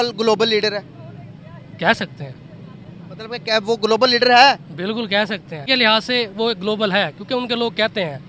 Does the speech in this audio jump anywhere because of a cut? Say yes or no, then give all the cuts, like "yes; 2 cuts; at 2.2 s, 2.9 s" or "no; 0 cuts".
yes; 1 cut; at 5.6 s